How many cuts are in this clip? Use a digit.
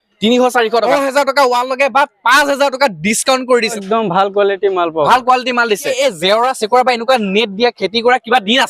3